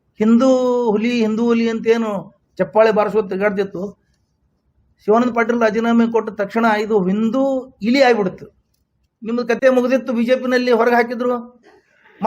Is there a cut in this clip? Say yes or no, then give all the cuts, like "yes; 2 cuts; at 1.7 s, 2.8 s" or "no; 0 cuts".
yes; 1 cut; at 9.5 s